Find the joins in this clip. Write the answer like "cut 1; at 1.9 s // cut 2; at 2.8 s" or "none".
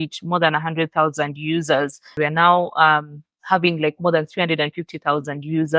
cut 1; at 2.1 s